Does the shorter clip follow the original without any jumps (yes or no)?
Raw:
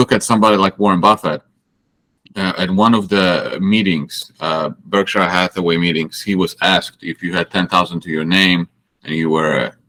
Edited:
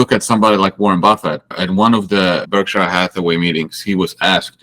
no